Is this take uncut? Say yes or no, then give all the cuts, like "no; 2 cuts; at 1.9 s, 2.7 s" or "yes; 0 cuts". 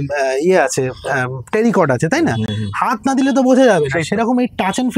yes; 0 cuts